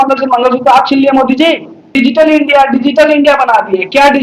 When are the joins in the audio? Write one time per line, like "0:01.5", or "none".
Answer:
0:01.9